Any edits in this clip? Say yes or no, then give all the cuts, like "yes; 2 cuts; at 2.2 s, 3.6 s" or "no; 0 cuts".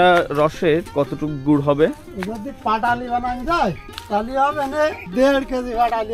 yes; 3 cuts; at 0.9 s, 3.9 s, 5.0 s